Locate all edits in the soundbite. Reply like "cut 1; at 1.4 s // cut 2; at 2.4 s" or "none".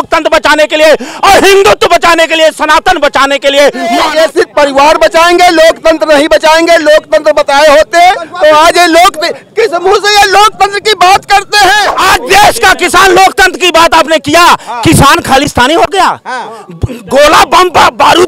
cut 1; at 4.2 s // cut 2; at 11.9 s